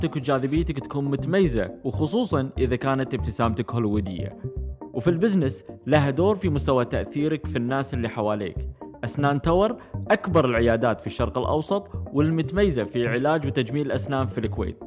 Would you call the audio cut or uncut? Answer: uncut